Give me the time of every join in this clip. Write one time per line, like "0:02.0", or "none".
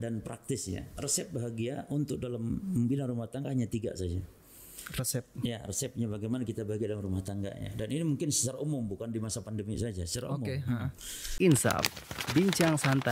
0:11.3

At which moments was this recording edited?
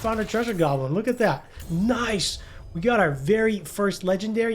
0:01.6

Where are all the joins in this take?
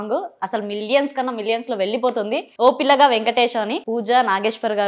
0:03.8

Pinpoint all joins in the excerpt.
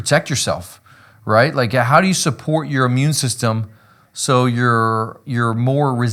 none

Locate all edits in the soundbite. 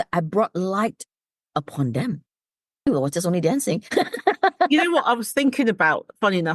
0:02.9

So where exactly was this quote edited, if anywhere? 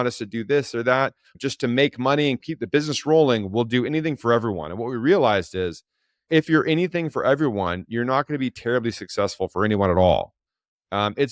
0:01.3
0:02.5

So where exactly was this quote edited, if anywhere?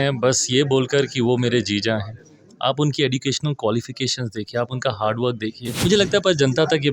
0:05.6

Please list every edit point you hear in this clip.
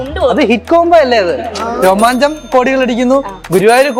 none

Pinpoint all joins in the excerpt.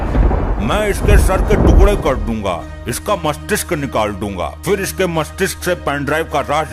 none

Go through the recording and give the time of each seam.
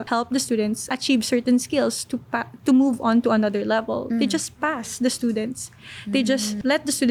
none

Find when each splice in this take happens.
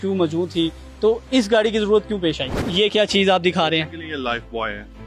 0:02.7

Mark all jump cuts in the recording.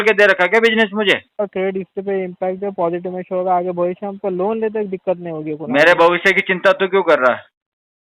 0:01.3

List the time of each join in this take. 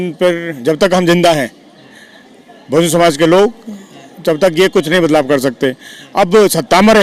none

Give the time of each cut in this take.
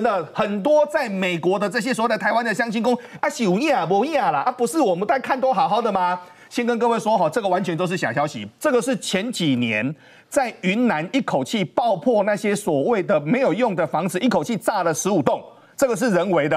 none

